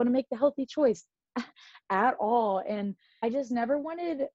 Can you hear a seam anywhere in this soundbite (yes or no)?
yes